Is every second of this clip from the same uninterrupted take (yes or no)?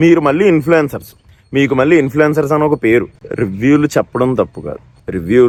yes